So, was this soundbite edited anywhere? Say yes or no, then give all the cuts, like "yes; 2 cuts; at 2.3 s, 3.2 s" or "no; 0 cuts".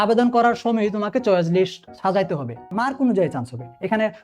yes; 1 cut; at 2.7 s